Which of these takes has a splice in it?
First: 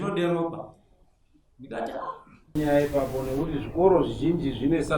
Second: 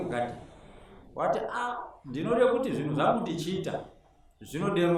first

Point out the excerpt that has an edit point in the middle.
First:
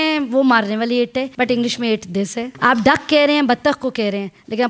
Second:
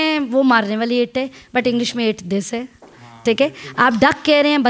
first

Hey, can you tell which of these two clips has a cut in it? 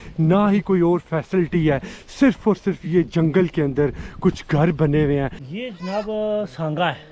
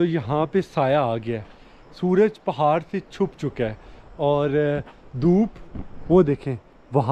first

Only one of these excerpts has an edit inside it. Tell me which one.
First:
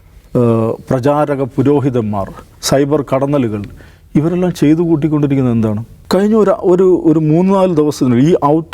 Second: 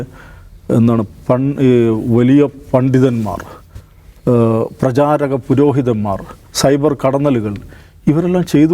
first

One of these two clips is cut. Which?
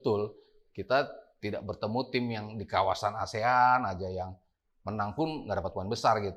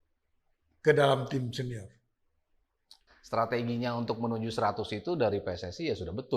second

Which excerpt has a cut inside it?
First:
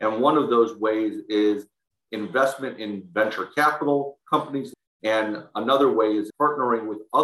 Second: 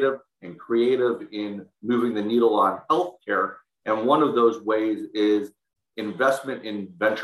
first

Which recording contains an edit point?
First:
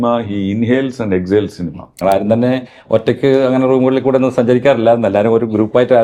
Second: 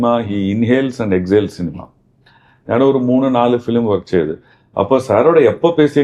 first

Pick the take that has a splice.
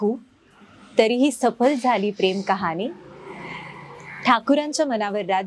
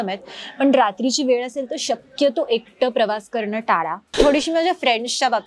second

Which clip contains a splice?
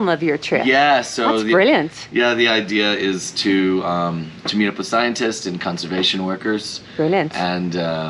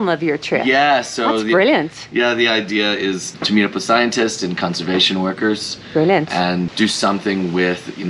second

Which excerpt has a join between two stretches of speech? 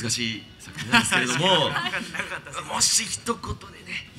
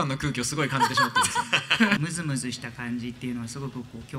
second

